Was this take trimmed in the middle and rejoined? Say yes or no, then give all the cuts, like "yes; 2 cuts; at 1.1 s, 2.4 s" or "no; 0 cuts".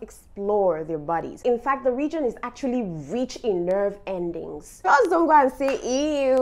yes; 2 cuts; at 1.4 s, 4.6 s